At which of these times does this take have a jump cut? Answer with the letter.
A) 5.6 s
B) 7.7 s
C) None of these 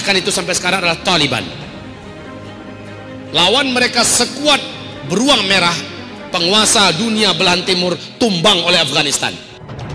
C